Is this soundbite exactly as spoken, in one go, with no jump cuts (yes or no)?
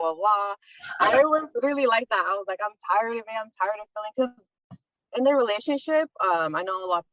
yes